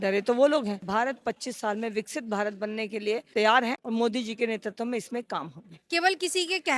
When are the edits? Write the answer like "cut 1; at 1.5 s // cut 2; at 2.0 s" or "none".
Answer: cut 1; at 0.8 s // cut 2; at 3.8 s // cut 3; at 5.9 s

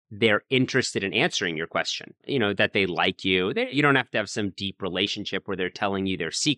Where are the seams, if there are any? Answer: cut 1; at 2.2 s // cut 2; at 3.7 s

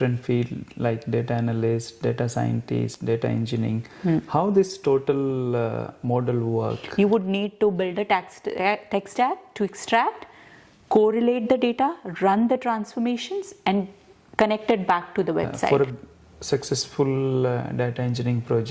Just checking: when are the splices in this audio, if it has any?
cut 1; at 6.8 s // cut 2; at 15.7 s

